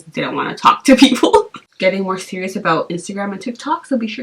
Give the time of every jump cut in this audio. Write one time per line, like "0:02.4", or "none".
0:01.6